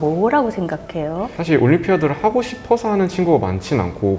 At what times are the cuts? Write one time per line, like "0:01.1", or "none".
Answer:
0:01.3